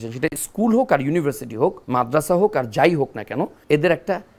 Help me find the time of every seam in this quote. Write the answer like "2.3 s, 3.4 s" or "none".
1.8 s, 3.6 s